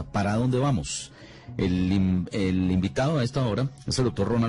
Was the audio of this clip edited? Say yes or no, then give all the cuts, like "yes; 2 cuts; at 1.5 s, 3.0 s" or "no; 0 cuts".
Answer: no; 0 cuts